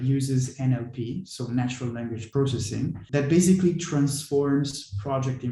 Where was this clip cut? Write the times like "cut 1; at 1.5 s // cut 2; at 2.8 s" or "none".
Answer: cut 1; at 2.4 s